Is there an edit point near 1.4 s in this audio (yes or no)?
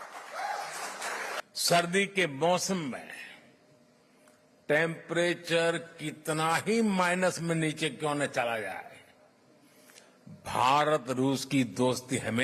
yes